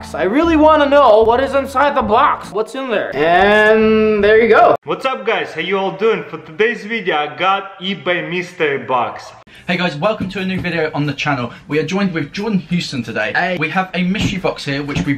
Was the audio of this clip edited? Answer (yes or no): yes